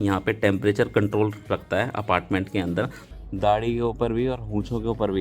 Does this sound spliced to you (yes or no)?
yes